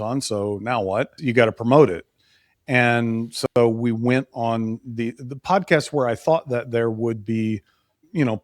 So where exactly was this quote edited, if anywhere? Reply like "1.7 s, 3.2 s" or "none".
1.2 s